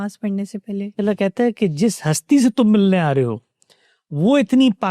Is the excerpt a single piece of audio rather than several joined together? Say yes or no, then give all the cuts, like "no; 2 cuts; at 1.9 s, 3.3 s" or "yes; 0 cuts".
no; 1 cut; at 1.0 s